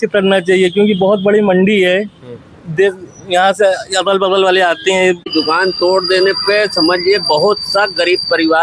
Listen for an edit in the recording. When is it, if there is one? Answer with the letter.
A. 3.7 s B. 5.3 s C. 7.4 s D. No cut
B